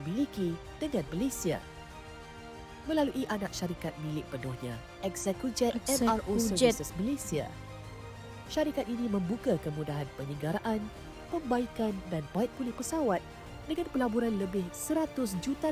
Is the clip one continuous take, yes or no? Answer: yes